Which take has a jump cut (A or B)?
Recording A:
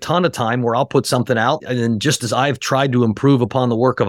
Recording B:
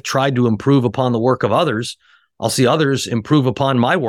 A